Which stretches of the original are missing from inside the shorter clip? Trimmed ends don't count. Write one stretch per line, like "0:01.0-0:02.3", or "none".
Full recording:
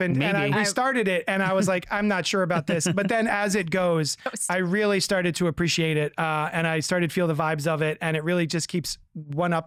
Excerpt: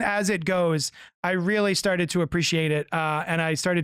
none